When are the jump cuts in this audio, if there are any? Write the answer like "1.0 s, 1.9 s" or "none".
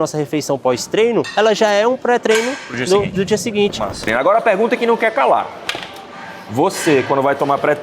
4.1 s